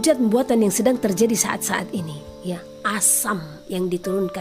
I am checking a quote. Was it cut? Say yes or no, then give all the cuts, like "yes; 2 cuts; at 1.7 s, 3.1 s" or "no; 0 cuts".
no; 0 cuts